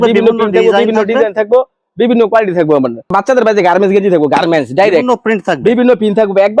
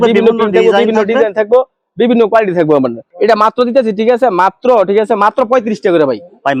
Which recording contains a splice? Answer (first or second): first